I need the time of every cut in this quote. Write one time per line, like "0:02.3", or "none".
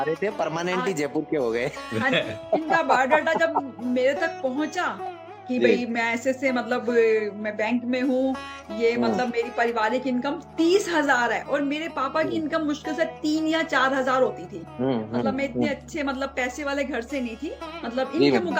none

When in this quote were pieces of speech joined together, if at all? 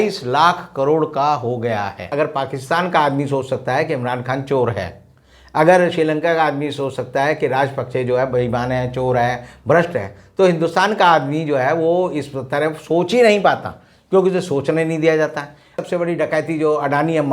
0:02.1
0:15.7

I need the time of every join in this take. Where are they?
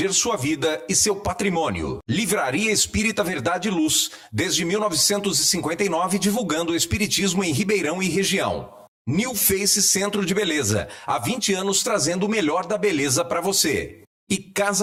none

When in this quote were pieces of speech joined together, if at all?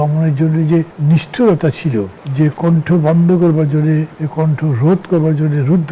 0:00.9
0:02.2
0:04.2

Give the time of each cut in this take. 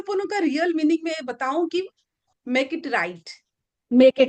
0:02.2

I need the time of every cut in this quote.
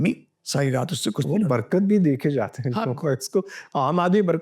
none

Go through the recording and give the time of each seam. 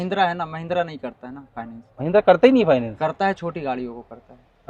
none

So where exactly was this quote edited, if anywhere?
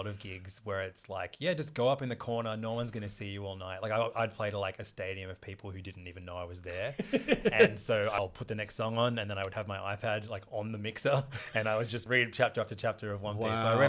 0:08.2
0:12.0

